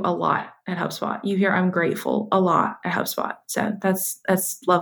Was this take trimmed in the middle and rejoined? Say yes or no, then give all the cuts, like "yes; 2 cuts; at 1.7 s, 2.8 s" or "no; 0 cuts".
no; 0 cuts